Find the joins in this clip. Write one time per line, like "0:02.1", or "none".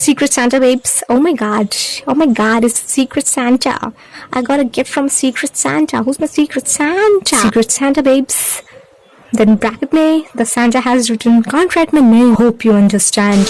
0:07.4
0:12.4